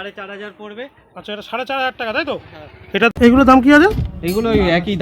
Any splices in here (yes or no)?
yes